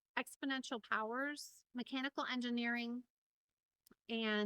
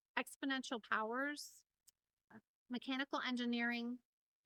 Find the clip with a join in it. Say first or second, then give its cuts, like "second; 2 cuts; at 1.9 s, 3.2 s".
first; 1 cut; at 1.5 s